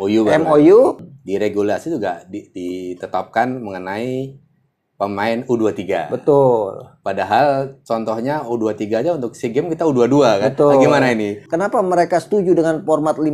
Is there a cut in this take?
yes; 2 cuts; at 1.1 s, 11.4 s

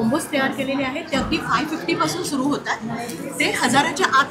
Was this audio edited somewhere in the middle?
no; 0 cuts

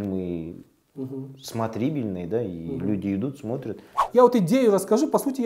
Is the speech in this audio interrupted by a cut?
yes; 1 cut; at 4.0 s

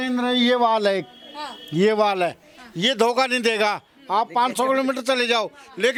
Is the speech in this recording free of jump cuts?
yes; 0 cuts

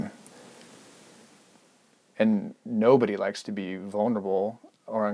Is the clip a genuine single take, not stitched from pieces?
yes; 0 cuts

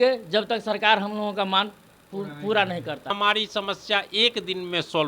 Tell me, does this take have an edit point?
yes; 1 cut; at 3.1 s

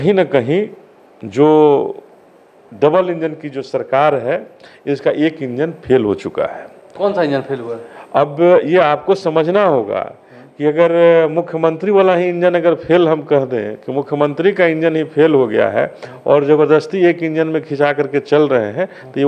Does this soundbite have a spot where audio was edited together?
no; 0 cuts

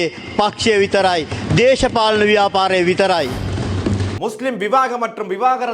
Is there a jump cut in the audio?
yes; 1 cut; at 4.1 s

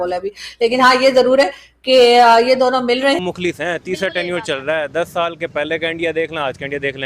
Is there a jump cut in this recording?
yes; 1 cut; at 3.2 s

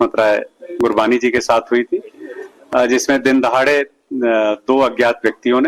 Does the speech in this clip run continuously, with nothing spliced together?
yes; 0 cuts

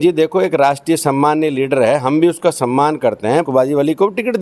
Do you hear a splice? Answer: yes; 1 cut; at 3.5 s

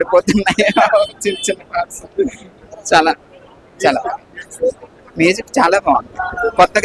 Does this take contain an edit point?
no; 0 cuts

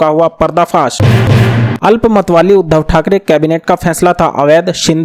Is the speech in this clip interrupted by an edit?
yes; 1 cut; at 1.0 s

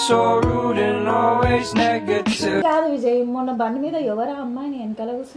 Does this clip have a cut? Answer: yes; 1 cut; at 2.6 s

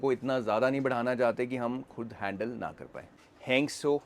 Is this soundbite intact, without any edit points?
no; 1 cut; at 3.1 s

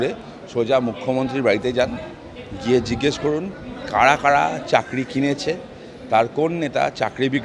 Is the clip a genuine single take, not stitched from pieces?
yes; 0 cuts

